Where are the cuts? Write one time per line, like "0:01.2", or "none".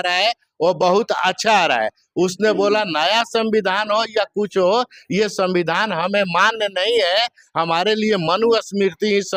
none